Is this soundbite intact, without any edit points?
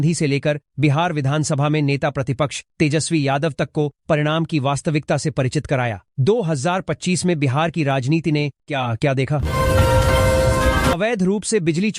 no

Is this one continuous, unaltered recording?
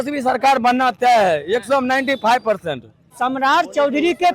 no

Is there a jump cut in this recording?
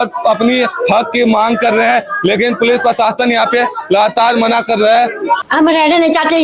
yes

